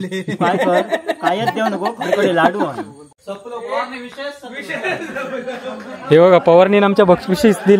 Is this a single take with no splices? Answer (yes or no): no